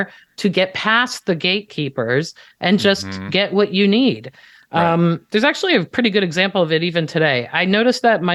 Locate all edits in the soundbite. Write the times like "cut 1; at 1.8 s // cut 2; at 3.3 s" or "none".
none